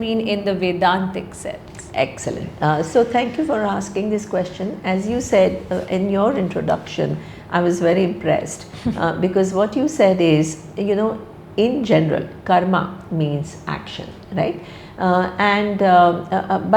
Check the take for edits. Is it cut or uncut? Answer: uncut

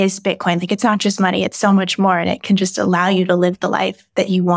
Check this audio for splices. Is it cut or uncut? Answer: uncut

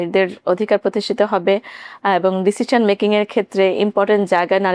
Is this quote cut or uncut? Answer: uncut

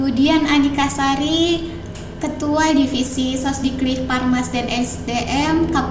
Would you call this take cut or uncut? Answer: uncut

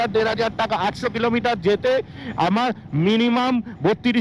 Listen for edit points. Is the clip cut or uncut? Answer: uncut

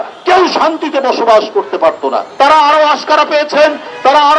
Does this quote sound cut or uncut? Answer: cut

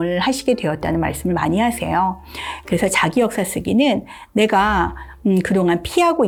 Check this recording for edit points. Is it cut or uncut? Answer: uncut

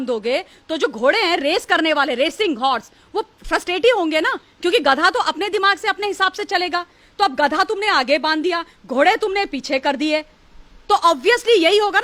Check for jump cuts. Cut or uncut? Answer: uncut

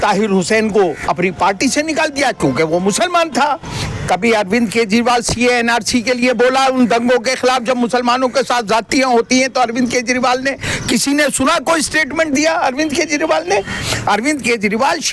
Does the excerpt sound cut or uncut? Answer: cut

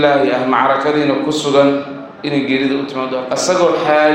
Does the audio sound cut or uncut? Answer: cut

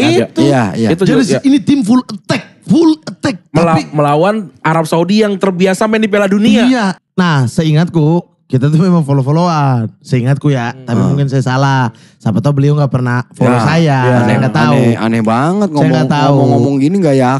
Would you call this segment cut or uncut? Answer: cut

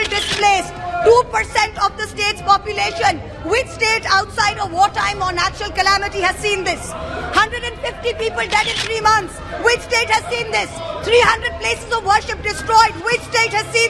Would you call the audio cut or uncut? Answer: uncut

